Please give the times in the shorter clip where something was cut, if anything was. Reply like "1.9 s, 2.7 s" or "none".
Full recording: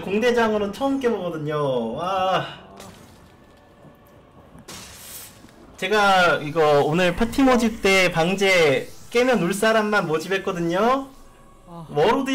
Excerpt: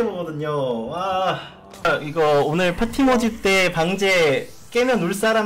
1.8 s